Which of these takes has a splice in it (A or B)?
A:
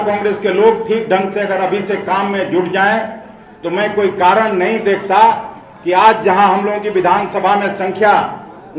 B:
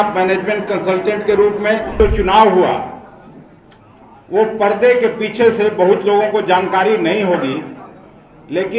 B